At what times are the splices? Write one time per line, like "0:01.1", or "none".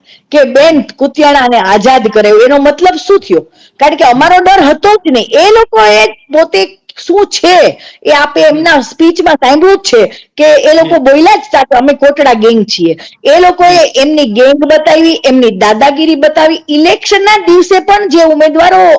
none